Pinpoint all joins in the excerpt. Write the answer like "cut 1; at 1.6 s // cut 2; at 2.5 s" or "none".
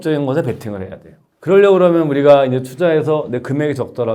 none

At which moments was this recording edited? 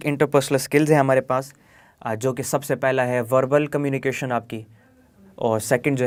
none

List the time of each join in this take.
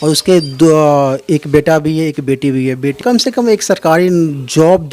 cut 1; at 3.0 s

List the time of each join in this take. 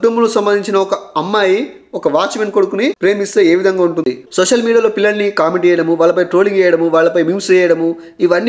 cut 1; at 3.0 s // cut 2; at 4.1 s

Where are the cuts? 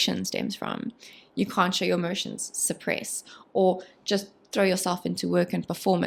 none

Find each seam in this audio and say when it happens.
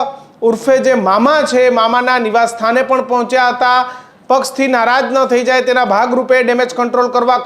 cut 1; at 4.1 s

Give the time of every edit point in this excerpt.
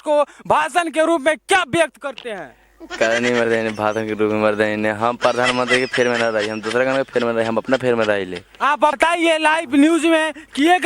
cut 1; at 9.0 s

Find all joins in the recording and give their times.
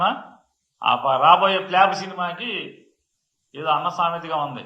none

